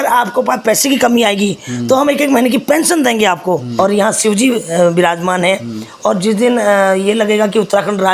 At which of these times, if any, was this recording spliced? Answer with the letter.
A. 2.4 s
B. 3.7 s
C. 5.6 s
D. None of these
B